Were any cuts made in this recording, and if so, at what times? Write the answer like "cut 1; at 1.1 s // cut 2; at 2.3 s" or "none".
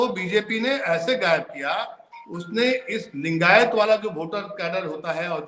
none